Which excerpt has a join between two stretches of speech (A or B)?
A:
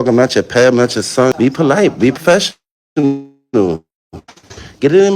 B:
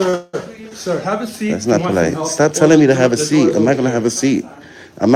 A